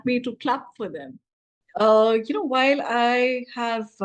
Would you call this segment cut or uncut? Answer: cut